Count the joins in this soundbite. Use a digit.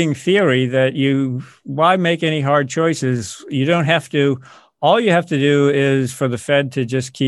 0